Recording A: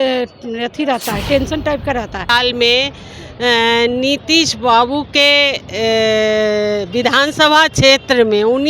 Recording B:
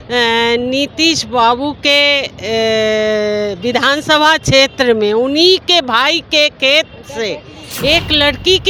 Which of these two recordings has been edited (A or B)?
A